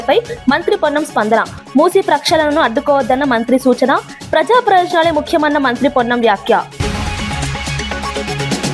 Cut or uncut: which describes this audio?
cut